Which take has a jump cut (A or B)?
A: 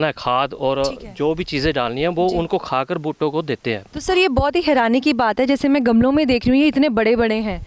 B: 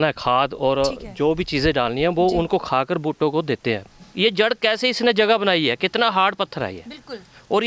B